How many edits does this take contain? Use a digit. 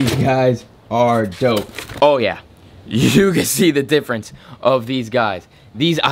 1